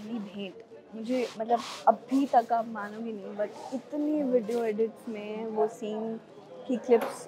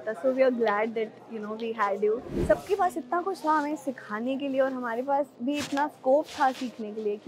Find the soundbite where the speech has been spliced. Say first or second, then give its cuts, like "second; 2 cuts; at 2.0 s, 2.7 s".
second; 1 cut; at 2.3 s